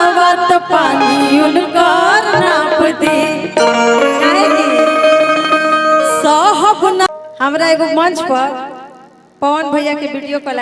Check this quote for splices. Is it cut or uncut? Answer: cut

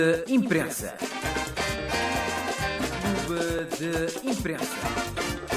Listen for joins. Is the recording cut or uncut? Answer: uncut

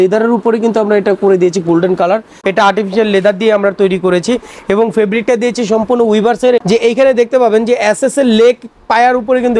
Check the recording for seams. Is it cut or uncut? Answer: cut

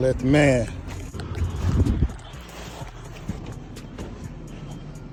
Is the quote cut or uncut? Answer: uncut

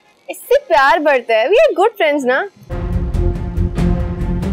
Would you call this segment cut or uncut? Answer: uncut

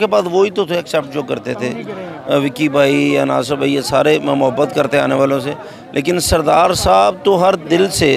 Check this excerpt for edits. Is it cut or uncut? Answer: uncut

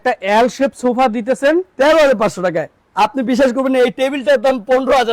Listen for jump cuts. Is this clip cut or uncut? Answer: uncut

